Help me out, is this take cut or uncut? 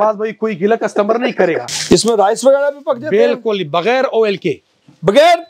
cut